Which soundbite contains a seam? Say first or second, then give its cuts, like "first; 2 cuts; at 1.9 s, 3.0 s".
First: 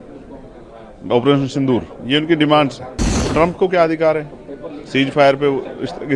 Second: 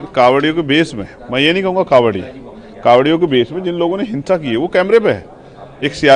first; 1 cut; at 3.2 s